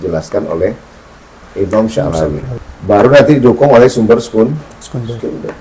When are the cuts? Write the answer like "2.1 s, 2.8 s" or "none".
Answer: 3.1 s